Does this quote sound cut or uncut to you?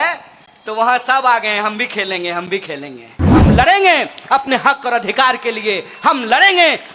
cut